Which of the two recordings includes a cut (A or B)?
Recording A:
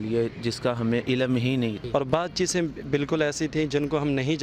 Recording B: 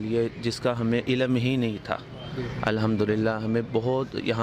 A